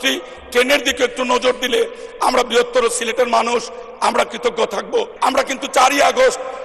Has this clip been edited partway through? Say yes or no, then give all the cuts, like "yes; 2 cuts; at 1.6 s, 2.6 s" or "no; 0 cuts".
yes; 1 cut; at 5.1 s